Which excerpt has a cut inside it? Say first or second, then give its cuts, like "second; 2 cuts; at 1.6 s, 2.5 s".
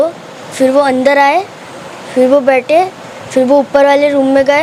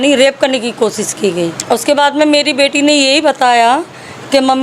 second; 1 cut; at 1.6 s